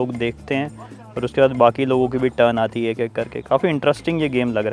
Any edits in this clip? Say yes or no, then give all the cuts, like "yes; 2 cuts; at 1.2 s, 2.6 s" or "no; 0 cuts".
no; 0 cuts